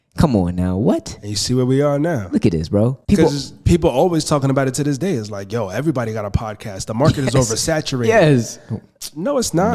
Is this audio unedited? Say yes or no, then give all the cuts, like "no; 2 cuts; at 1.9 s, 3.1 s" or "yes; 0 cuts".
no; 1 cut; at 3.5 s